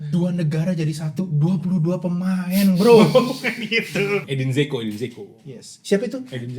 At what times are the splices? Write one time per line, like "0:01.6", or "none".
0:04.2